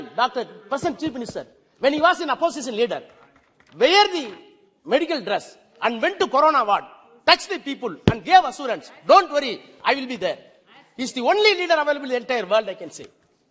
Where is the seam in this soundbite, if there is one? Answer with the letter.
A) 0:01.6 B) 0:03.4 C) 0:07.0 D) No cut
D